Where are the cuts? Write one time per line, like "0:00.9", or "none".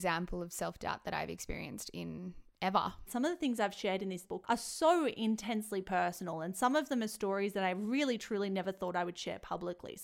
0:03.1
0:04.2